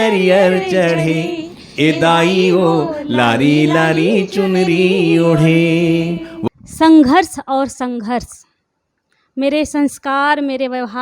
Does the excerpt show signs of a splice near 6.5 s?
yes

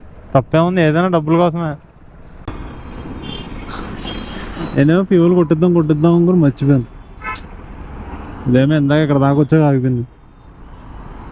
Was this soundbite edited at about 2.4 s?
yes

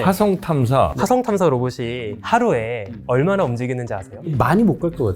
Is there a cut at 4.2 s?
yes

